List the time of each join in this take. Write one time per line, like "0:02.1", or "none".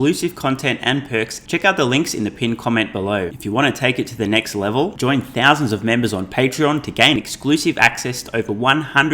0:01.4
0:03.3